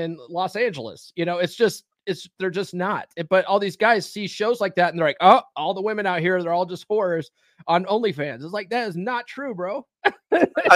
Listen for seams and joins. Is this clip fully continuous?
yes; 0 cuts

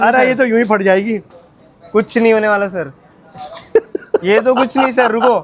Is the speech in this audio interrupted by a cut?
no; 0 cuts

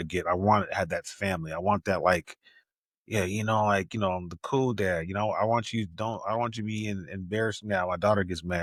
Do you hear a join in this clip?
no; 0 cuts

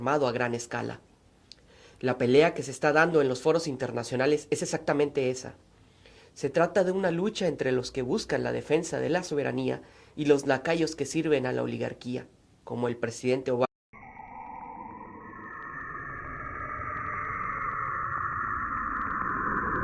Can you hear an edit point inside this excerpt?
no; 0 cuts

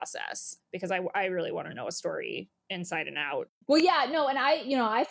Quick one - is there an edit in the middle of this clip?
yes; 1 cut; at 3.5 s

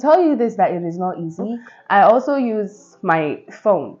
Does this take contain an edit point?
yes; 1 cut; at 1.6 s

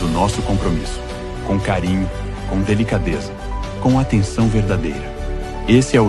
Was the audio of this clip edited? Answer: no; 0 cuts

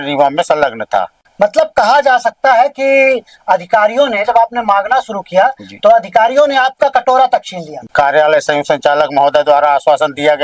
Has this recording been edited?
yes; 2 cuts; at 1.2 s, 7.8 s

